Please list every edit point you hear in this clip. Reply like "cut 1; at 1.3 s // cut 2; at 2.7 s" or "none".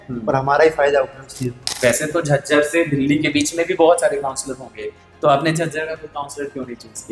cut 1; at 1.6 s